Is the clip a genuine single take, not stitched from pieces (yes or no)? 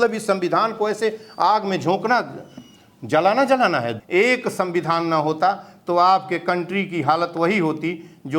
no